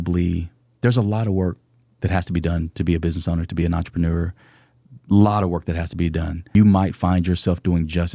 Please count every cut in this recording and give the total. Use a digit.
1